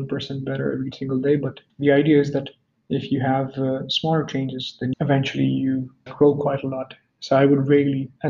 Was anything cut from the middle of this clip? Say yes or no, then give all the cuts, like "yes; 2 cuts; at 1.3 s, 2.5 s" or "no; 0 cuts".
no; 0 cuts